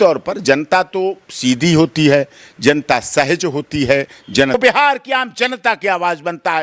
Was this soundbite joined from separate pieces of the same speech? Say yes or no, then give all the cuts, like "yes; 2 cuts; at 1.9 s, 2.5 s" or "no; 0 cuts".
yes; 1 cut; at 4.5 s